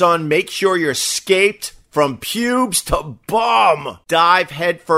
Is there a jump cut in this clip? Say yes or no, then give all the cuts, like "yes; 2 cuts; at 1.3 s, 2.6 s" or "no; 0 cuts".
yes; 1 cut; at 3.9 s